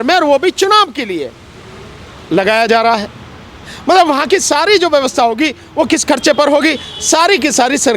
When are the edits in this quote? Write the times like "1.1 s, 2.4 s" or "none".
none